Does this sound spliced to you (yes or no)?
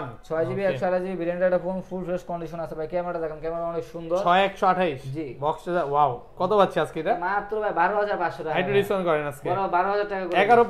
no